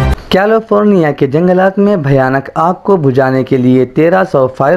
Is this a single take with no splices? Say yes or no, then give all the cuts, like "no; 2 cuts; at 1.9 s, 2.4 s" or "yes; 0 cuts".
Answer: yes; 0 cuts